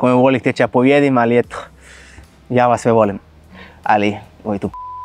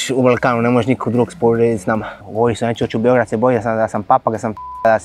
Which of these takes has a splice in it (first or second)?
second